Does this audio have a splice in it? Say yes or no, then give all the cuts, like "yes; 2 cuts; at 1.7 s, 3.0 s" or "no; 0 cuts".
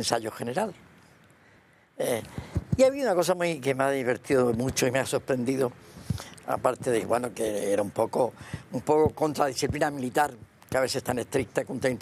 no; 0 cuts